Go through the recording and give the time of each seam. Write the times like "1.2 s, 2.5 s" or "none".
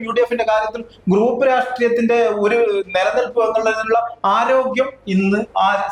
none